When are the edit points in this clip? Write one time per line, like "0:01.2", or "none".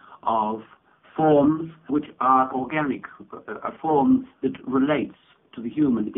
0:04.6